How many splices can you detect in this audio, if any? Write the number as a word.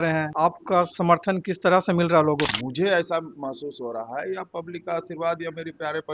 one